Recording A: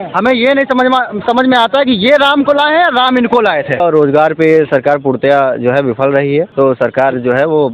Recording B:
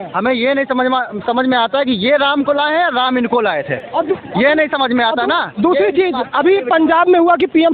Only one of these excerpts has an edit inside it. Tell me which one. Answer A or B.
A